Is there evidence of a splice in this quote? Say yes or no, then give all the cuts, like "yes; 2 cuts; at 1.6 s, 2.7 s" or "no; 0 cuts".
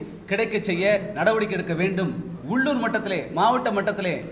yes; 1 cut; at 2.3 s